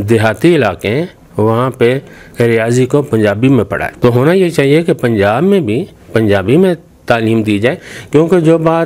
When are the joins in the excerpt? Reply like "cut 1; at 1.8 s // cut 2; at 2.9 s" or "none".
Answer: cut 1; at 3.8 s